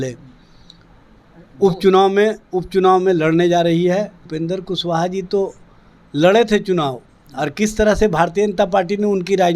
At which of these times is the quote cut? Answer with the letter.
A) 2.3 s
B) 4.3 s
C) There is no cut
B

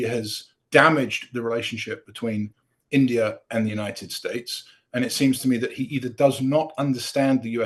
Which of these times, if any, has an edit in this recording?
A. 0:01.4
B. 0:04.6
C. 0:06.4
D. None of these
D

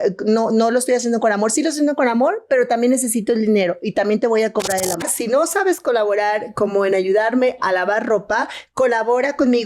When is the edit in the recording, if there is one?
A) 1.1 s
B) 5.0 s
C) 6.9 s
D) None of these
B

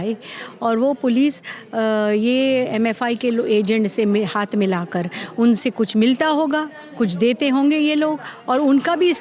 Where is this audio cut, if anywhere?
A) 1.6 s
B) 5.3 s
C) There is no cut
C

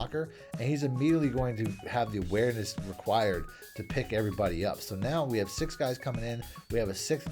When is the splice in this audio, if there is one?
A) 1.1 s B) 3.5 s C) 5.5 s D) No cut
D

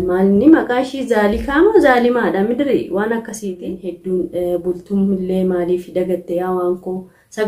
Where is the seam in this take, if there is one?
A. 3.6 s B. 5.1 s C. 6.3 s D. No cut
A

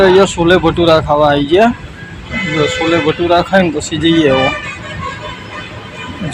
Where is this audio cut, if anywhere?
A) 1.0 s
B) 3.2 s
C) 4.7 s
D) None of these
D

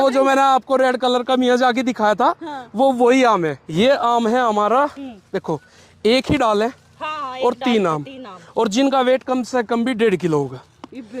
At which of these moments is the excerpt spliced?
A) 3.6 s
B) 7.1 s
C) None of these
A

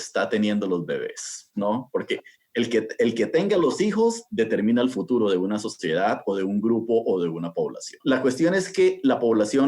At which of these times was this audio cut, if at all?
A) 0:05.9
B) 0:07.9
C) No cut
B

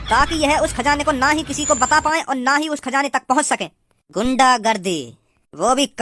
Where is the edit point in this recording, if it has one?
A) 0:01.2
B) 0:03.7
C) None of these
C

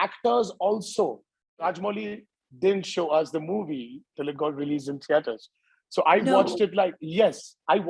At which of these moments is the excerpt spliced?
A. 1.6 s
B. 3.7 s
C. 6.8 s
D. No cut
A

